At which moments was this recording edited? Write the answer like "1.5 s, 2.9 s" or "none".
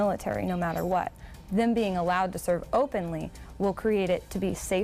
none